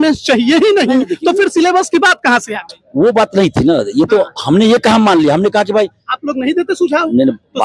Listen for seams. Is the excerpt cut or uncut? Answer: uncut